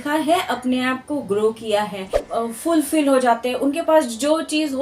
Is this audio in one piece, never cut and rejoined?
no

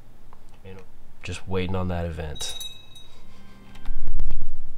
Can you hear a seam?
yes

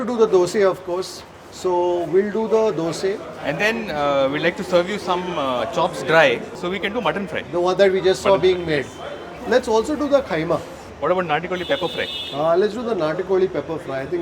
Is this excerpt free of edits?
yes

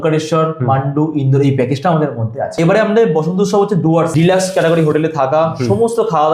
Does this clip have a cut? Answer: yes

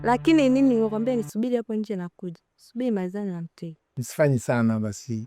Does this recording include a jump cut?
no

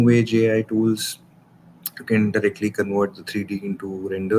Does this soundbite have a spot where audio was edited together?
no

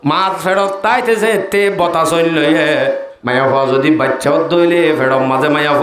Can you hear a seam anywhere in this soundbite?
yes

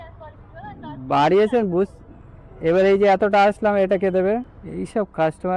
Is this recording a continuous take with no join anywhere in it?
no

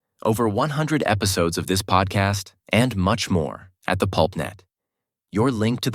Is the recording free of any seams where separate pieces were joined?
yes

